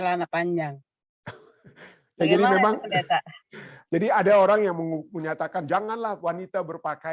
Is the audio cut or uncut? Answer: uncut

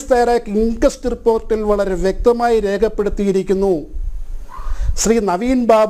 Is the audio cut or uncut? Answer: uncut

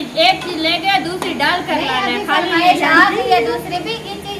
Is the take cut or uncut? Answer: uncut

